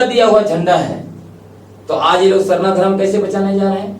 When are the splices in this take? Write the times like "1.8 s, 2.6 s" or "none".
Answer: none